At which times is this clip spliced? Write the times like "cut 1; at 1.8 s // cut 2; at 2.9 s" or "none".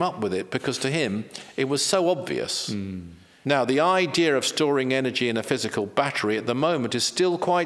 cut 1; at 3.3 s